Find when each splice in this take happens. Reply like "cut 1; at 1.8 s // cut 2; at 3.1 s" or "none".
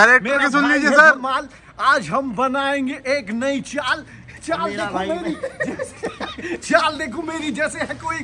none

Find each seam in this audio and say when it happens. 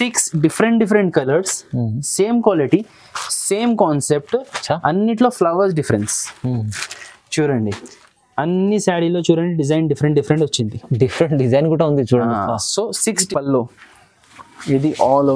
cut 1; at 13.2 s

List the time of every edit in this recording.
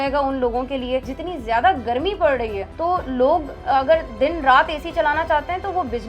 cut 1; at 1.1 s // cut 2; at 2.6 s

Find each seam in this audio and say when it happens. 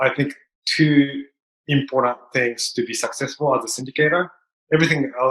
none

